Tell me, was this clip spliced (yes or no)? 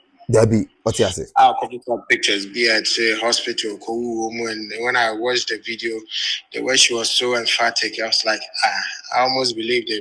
no